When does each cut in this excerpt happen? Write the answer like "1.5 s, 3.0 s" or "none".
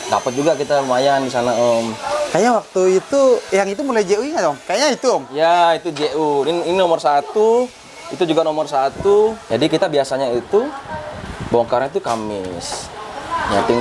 9.4 s